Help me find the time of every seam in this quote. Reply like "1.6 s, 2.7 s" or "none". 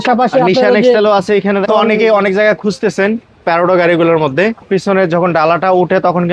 1.6 s